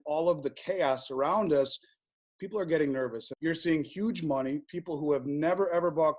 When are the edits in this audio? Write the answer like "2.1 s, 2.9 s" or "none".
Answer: 3.2 s